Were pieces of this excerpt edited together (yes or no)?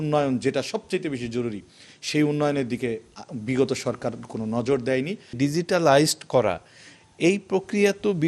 yes